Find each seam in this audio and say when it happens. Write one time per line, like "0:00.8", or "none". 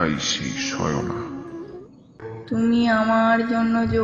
0:01.8